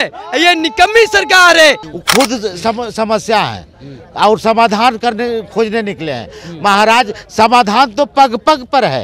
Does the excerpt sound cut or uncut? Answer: cut